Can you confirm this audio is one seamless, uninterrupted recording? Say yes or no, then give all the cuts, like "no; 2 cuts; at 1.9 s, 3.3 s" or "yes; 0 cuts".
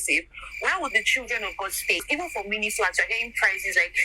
no; 1 cut; at 2.0 s